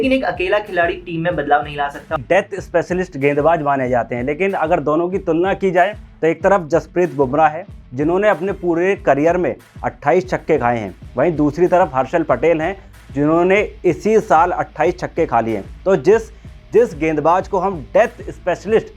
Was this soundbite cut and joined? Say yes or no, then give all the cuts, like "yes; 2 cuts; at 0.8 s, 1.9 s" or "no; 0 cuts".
yes; 1 cut; at 2.2 s